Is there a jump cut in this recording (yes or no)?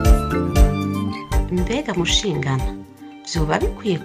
yes